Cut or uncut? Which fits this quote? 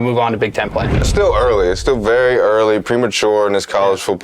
cut